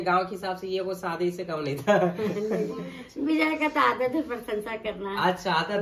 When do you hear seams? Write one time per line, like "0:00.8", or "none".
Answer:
none